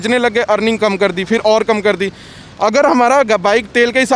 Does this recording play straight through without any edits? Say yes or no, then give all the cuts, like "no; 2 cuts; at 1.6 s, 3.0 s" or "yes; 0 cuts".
yes; 0 cuts